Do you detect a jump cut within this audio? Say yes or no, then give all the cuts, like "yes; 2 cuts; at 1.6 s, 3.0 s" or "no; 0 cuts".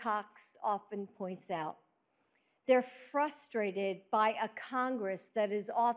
yes; 1 cut; at 4.6 s